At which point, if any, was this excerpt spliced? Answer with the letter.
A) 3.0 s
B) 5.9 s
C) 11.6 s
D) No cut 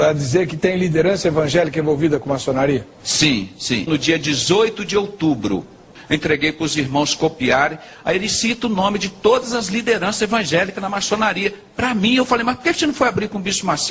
B